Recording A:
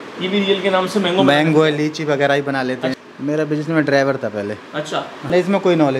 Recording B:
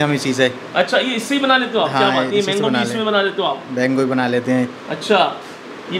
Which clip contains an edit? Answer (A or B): A